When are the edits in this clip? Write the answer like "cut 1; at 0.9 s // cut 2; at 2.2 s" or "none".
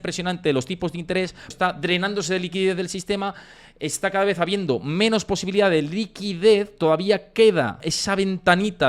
cut 1; at 1.5 s // cut 2; at 7.9 s

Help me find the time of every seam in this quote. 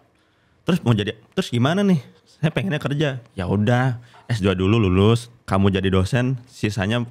cut 1; at 5.3 s

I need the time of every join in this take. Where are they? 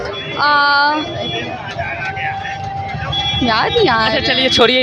none

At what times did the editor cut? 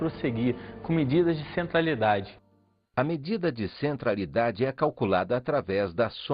cut 1; at 2.2 s

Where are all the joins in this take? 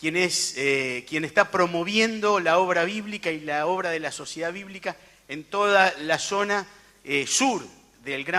cut 1; at 1.5 s

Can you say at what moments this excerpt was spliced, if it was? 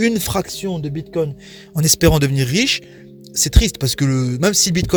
none

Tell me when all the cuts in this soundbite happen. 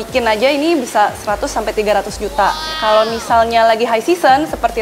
cut 1; at 2.7 s

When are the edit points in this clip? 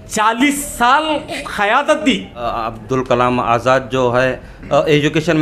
cut 1; at 2.5 s

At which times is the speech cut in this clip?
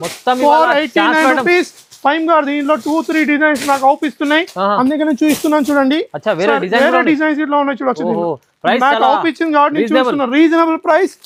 none

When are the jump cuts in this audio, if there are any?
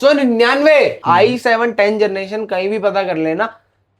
cut 1; at 1.0 s

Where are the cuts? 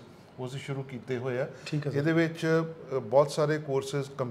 none

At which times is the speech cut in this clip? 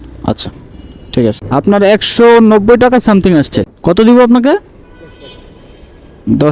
cut 1; at 1.4 s // cut 2; at 3.7 s

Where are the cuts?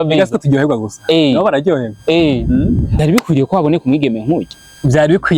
cut 1; at 2.9 s

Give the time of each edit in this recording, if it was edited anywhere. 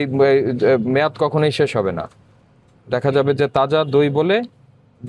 none

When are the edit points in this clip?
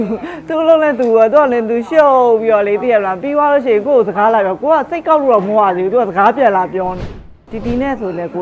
cut 1; at 7.4 s

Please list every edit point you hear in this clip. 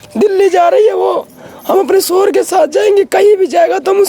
none

